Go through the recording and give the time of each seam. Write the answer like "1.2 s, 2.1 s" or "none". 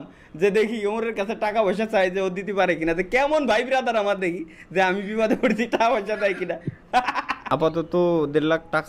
7.4 s